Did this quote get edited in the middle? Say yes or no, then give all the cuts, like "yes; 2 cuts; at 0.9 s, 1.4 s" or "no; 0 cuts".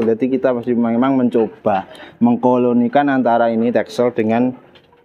no; 0 cuts